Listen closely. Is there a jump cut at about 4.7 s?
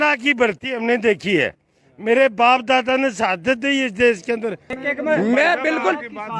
yes; 1 cut; at 4.7 s

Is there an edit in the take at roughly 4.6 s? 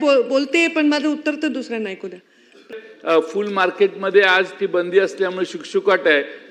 no; 1 cut; at 2.7 s

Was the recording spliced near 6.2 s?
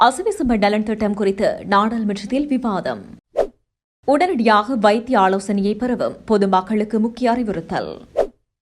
no; 0 cuts

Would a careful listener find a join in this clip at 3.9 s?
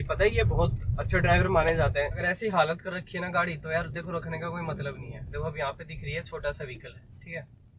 no; 2 cuts; at 2.2 s, 5.1 s

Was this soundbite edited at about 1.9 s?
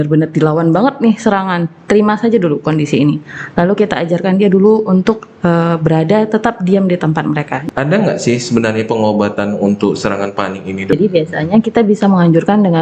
no; 2 cuts; at 7.6 s, 10.9 s

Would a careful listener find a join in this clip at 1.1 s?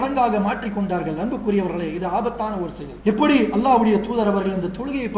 no; 1 cut; at 2.8 s

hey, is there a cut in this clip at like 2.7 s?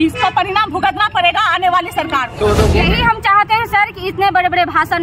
yes; 1 cut; at 2.7 s

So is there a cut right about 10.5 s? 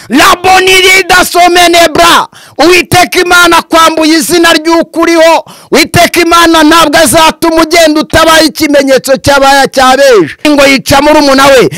yes; 1 cut; at 10.5 s

